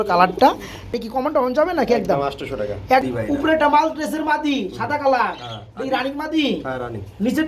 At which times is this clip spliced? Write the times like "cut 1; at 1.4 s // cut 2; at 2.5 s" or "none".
cut 1; at 1.0 s // cut 2; at 3.0 s